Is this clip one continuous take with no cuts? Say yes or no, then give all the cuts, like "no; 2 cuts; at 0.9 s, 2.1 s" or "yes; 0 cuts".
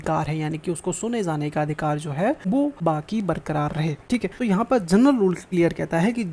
no; 3 cuts; at 2.6 s, 4.3 s, 5.4 s